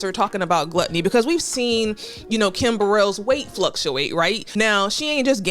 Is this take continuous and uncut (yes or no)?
no